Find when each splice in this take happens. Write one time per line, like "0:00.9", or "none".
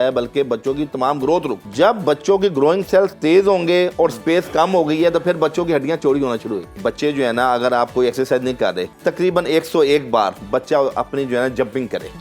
0:01.6
0:06.8
0:08.9